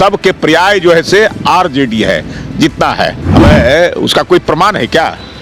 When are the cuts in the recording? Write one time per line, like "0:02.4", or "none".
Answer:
0:03.2